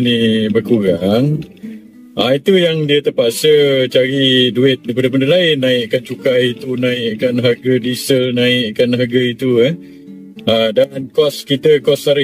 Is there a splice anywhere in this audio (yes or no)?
no